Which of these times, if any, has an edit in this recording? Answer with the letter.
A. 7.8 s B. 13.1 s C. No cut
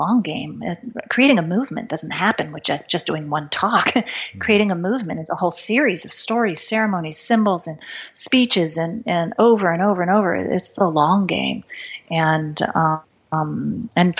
B